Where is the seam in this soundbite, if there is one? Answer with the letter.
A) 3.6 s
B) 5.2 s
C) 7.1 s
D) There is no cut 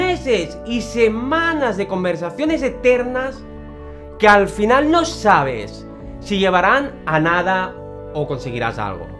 D